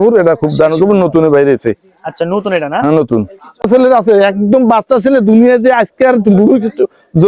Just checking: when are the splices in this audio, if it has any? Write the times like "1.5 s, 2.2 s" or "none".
3.7 s